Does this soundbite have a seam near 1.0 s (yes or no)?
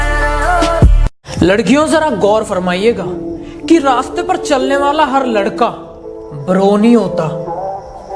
yes